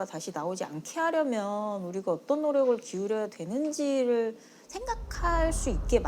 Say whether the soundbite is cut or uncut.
uncut